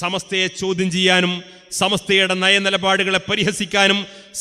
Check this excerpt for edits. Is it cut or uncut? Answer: uncut